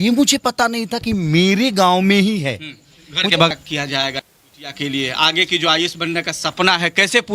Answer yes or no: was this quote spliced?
yes